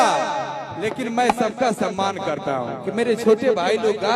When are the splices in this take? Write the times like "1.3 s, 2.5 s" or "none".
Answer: none